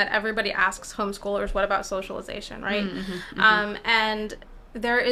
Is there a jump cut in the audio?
no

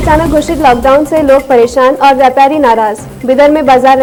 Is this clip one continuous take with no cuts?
yes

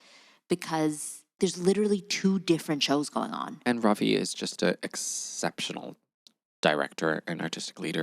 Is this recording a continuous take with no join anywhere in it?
no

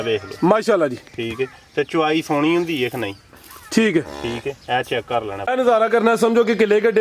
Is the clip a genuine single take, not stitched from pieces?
no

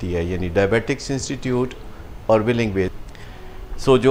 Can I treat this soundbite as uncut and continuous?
no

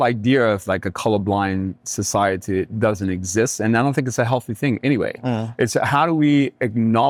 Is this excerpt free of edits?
yes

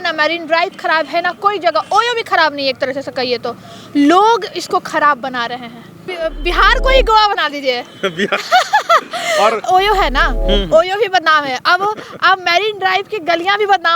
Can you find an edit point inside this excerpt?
yes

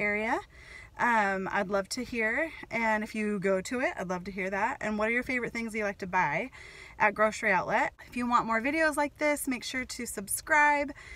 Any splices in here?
yes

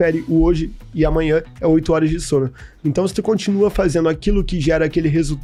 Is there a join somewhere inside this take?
no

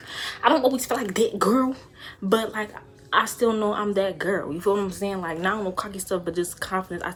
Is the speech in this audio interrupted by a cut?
no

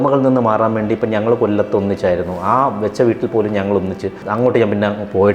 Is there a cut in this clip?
yes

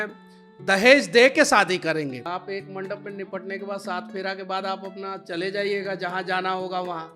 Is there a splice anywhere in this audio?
yes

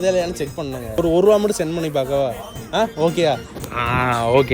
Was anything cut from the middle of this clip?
yes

